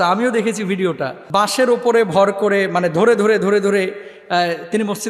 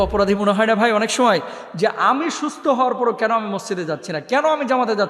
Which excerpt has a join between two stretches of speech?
first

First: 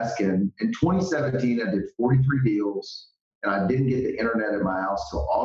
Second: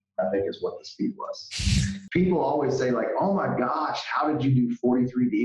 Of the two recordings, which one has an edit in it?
second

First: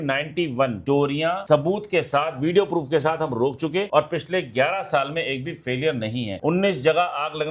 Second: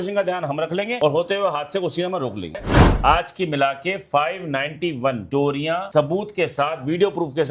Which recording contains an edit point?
second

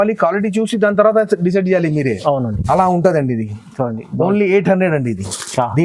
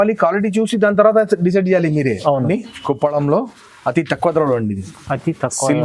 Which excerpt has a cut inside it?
second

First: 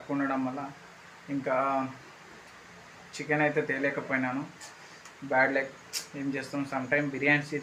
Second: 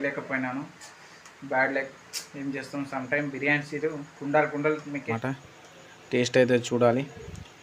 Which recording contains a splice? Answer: second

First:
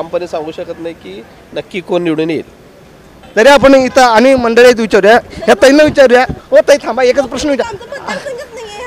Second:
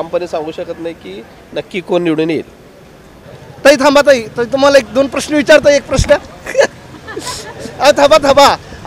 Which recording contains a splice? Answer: second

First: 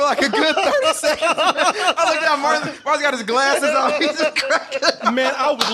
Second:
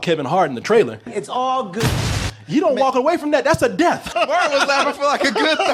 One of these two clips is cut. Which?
second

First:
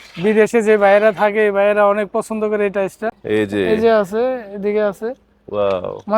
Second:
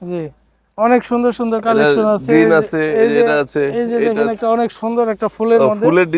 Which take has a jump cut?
first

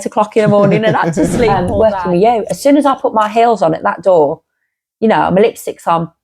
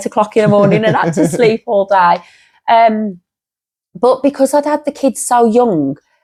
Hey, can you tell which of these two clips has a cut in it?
first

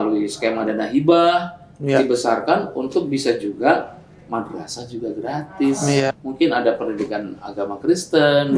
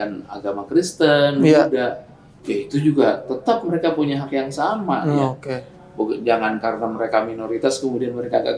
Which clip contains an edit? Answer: first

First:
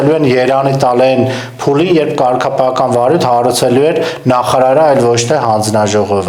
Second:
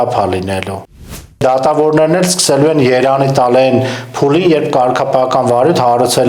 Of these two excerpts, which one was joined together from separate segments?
second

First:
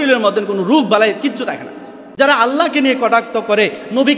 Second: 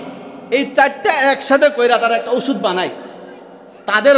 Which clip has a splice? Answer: first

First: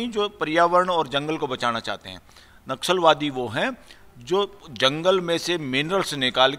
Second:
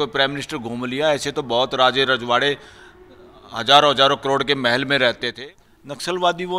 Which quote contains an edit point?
second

